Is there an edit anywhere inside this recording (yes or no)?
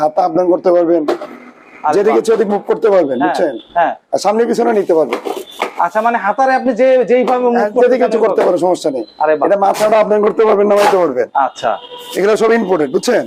no